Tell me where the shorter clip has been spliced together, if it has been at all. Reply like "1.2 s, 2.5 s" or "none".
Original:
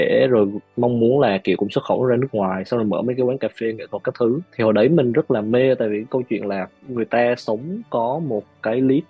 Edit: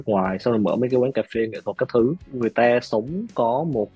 2.2 s